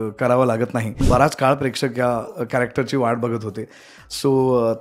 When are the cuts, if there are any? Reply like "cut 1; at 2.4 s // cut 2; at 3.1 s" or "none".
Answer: cut 1; at 1.0 s